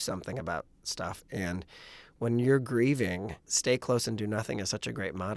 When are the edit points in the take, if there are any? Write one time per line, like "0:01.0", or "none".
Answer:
0:03.5